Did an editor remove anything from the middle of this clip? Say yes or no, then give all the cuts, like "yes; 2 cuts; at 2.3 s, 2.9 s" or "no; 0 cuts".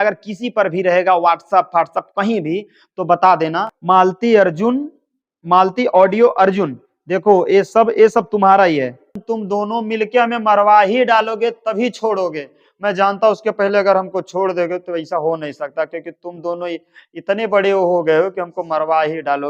yes; 2 cuts; at 3.7 s, 9.2 s